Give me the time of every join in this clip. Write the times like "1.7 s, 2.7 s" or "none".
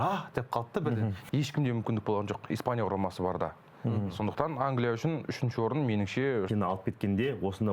1.2 s, 6.5 s